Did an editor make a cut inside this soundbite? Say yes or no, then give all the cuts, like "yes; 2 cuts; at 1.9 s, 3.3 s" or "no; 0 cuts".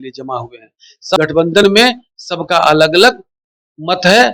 yes; 1 cut; at 1.2 s